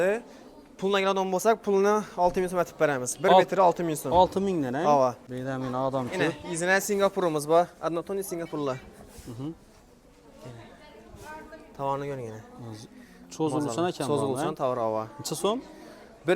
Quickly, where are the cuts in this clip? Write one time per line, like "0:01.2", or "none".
0:05.3

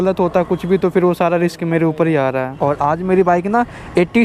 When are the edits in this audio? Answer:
0:02.6

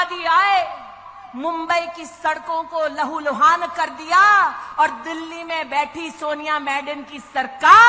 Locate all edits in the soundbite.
none

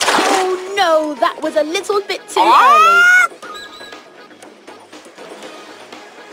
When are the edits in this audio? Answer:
0:02.1

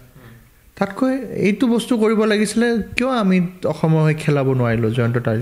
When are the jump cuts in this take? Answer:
none

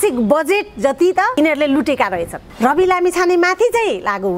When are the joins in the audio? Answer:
0:01.3
0:02.4

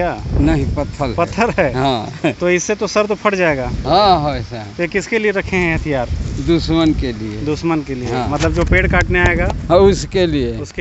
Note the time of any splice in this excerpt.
none

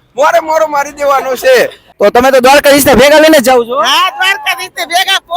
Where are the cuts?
0:01.8

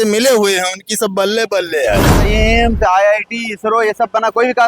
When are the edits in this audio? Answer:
0:02.1

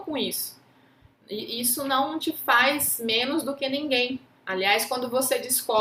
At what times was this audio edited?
0:04.3

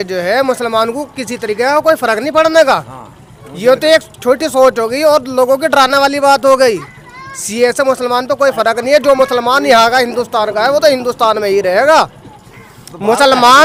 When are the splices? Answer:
none

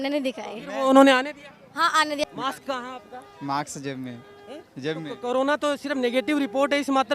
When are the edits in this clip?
0:02.2

